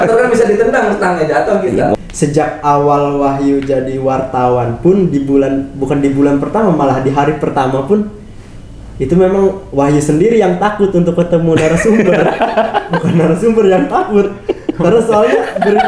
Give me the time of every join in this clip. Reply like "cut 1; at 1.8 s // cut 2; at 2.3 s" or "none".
cut 1; at 1.9 s